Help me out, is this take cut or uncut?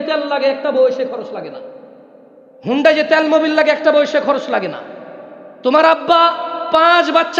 uncut